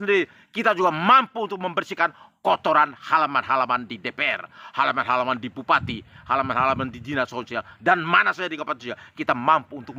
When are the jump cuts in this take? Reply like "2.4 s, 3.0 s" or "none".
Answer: none